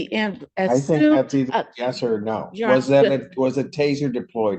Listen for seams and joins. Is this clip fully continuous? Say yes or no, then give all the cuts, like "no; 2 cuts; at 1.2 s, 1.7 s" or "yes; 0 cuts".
yes; 0 cuts